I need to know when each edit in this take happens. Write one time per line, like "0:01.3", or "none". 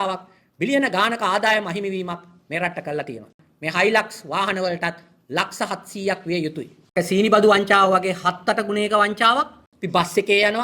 0:03.4
0:06.8
0:09.4

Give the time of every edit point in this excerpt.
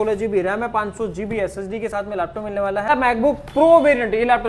0:02.9

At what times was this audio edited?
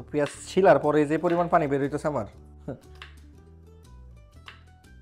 none

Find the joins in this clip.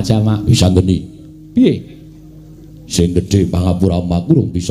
0:03.3

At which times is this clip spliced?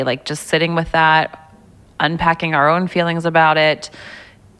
none

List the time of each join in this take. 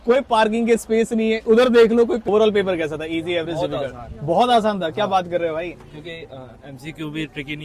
0:02.2

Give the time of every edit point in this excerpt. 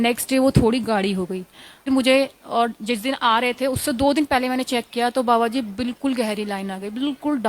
0:01.9

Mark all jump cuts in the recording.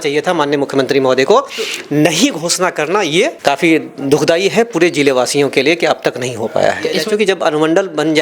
0:03.4
0:06.9

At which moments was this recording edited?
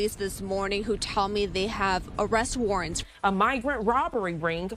0:03.0

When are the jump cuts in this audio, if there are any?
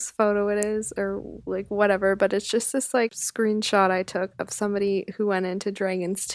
0:03.2

